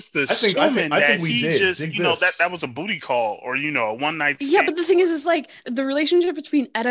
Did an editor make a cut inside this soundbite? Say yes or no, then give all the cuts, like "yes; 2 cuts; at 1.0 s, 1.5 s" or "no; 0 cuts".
yes; 1 cut; at 5.6 s